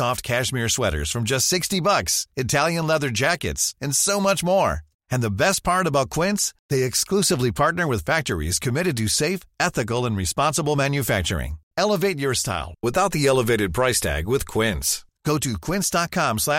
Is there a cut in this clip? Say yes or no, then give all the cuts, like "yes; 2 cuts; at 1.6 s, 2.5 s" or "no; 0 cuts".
no; 0 cuts